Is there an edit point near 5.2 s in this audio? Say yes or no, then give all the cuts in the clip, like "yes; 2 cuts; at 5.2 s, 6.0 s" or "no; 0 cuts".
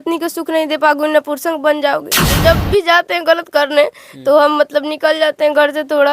no; 1 cut; at 2.3 s